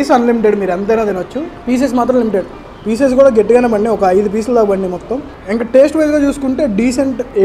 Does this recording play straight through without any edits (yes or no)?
yes